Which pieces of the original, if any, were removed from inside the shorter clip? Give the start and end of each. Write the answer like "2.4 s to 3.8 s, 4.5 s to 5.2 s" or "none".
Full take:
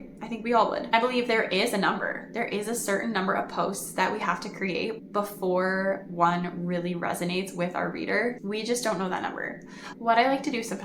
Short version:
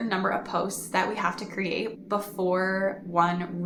none